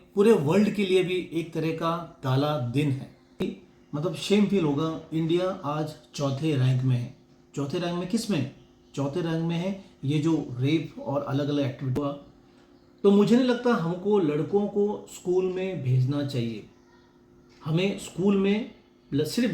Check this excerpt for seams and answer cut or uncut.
cut